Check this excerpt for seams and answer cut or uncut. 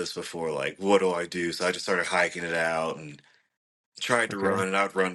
uncut